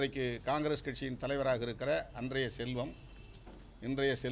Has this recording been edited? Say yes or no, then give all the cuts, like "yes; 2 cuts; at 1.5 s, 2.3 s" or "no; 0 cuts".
no; 0 cuts